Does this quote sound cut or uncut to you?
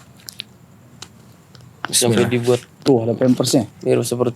uncut